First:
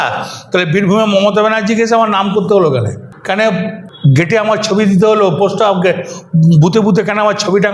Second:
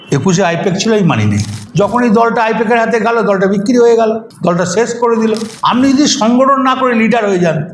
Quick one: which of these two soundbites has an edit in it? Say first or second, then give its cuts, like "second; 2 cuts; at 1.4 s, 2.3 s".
second; 2 cuts; at 1.6 s, 5.5 s